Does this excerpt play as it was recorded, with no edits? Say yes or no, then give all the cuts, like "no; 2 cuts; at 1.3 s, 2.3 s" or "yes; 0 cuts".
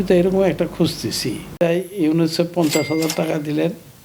no; 1 cut; at 1.5 s